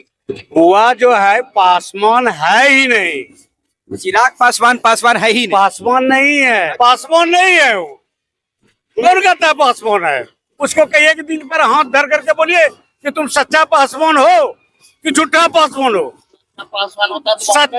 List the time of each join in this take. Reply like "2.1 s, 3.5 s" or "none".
6.7 s, 10.5 s